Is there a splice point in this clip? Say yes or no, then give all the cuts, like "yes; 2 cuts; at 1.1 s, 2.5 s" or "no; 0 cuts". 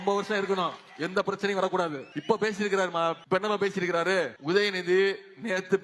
yes; 3 cuts; at 2.1 s, 3.2 s, 4.4 s